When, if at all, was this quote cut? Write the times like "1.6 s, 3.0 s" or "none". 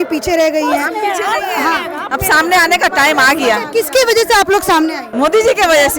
5.0 s